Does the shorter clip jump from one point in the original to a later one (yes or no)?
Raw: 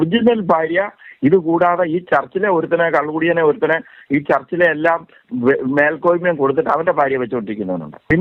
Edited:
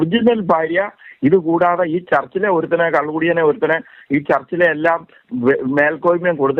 no